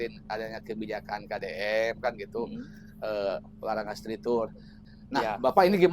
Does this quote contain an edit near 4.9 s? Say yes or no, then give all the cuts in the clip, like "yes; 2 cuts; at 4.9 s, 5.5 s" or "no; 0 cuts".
yes; 1 cut; at 4.9 s